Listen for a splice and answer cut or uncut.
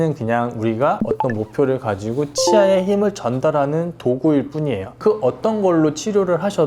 cut